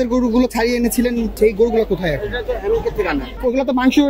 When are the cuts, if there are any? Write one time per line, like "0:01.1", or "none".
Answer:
0:01.3
0:03.4